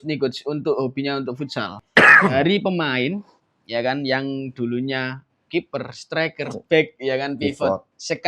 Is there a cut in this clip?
yes; 1 cut; at 1.7 s

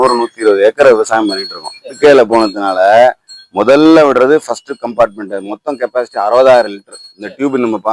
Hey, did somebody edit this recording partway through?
yes; 1 cut; at 2.0 s

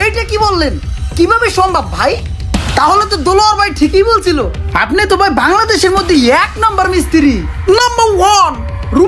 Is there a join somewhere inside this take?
no; 0 cuts

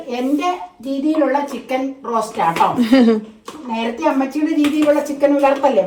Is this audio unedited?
yes; 0 cuts

